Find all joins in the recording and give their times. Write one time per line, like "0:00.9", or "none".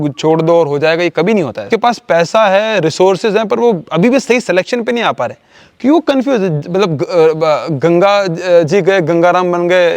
0:01.7

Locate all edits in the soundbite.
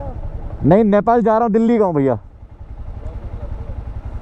none

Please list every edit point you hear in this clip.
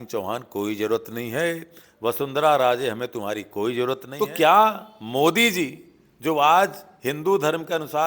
0:04.1

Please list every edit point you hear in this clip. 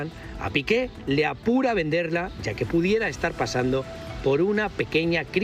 none

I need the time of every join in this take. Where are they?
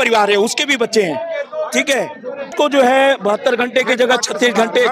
none

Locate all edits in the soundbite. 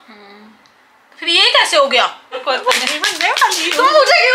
0:02.4

